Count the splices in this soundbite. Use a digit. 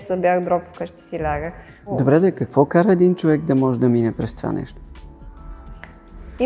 1